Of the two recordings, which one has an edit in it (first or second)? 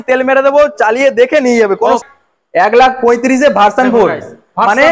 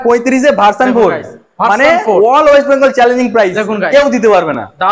first